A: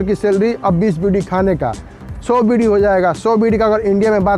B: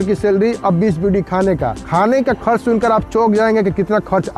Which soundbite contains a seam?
B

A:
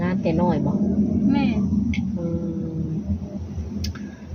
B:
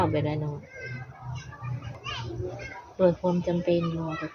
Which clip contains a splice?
B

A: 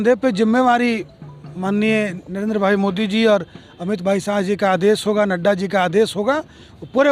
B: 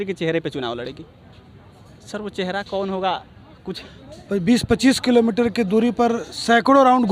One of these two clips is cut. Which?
B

